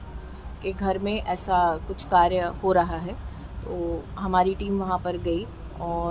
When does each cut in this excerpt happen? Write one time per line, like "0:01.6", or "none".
none